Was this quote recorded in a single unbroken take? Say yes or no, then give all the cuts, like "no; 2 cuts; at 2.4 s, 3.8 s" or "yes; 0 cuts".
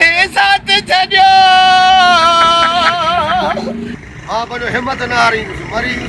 no; 1 cut; at 3.9 s